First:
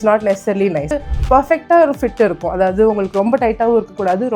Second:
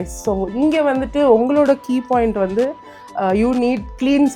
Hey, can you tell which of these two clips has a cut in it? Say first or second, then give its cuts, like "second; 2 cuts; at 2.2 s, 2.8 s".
first; 1 cut; at 1.0 s